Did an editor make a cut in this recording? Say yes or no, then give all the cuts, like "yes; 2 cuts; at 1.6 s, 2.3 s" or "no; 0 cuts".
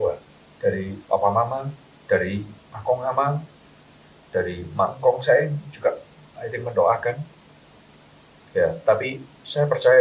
no; 0 cuts